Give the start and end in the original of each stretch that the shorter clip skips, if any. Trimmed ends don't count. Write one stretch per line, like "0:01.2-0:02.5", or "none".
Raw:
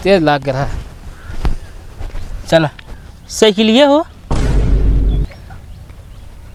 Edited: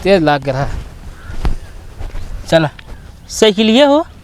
none